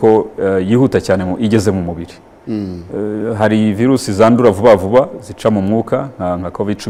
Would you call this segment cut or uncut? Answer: uncut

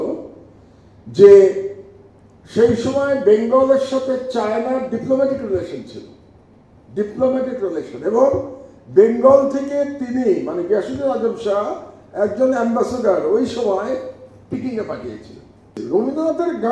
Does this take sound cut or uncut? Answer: cut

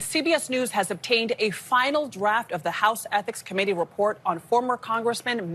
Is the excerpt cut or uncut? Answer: uncut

